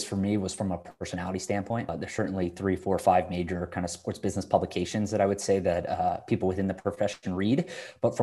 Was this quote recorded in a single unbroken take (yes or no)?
no